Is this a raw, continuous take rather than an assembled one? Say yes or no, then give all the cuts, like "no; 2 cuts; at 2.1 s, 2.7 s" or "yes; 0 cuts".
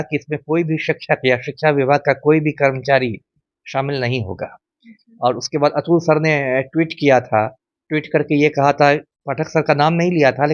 yes; 0 cuts